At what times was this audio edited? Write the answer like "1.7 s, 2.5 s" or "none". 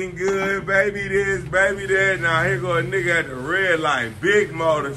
none

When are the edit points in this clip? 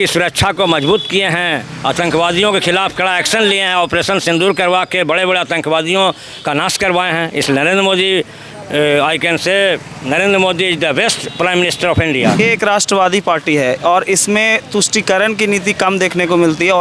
12.4 s

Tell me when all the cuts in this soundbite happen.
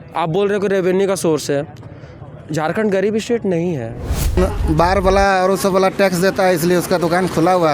4.4 s

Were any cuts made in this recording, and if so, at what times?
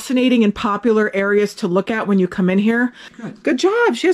3.1 s

